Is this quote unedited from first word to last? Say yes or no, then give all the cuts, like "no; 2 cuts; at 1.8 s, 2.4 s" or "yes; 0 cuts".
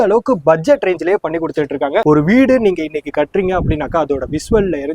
no; 1 cut; at 2.0 s